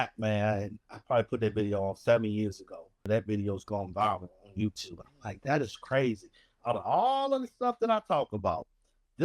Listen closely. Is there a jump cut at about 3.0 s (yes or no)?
yes